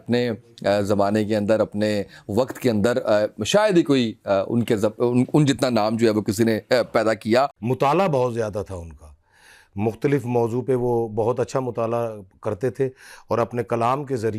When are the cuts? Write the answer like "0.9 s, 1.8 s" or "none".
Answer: 7.6 s